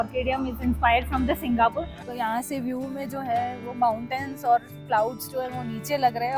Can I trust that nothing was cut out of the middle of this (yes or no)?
no